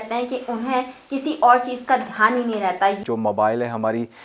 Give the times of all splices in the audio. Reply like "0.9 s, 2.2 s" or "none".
3.0 s